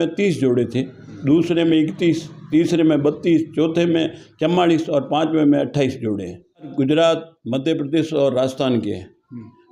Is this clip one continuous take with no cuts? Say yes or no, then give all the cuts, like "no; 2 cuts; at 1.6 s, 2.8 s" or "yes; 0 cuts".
no; 1 cut; at 6.7 s